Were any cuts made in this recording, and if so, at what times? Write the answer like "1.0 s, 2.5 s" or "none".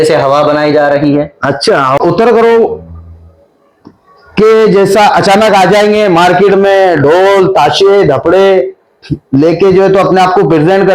2.0 s